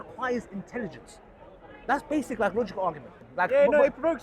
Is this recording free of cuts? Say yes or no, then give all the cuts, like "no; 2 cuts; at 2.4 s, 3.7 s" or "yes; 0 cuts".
no; 1 cut; at 3.2 s